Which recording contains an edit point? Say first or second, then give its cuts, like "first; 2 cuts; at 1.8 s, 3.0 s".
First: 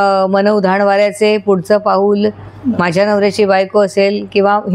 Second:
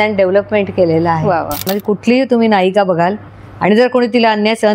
second; 1 cut; at 1.8 s